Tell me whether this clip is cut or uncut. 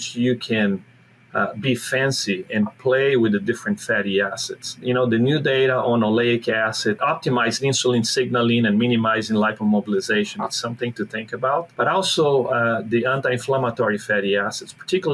cut